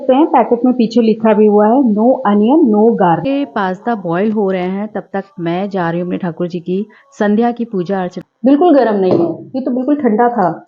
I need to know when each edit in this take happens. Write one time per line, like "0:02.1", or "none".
0:03.2
0:08.2